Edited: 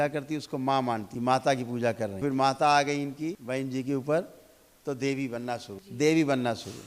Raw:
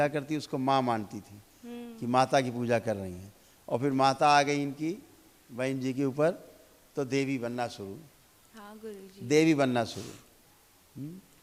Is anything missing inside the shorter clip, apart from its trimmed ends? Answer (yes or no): yes